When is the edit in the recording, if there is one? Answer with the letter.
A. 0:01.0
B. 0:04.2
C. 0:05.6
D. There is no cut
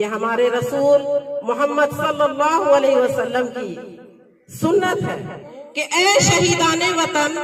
C